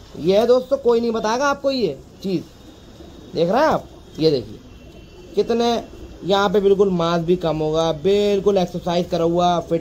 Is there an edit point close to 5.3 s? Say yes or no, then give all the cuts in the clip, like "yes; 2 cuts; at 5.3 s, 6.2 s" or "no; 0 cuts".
no; 0 cuts